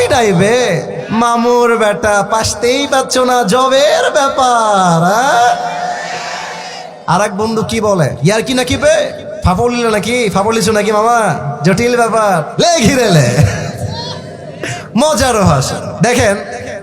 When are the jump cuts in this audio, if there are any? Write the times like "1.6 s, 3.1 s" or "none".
1.0 s, 8.1 s, 9.3 s, 12.5 s, 15.8 s